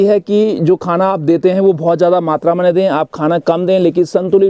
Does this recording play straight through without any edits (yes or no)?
yes